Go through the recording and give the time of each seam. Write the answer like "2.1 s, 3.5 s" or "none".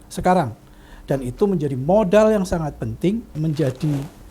3.3 s